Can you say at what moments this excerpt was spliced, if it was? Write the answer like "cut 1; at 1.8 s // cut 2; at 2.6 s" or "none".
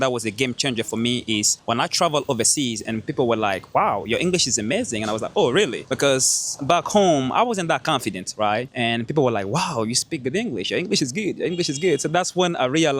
cut 1; at 1.5 s // cut 2; at 5.8 s // cut 3; at 8.7 s